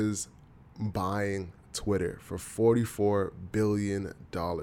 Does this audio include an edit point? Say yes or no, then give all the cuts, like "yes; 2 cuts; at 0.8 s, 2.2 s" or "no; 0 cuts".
no; 0 cuts